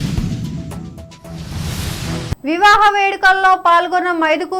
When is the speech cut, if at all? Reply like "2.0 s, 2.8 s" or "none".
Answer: 2.4 s